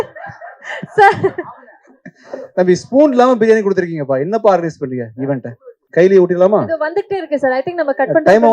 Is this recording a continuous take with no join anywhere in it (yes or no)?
yes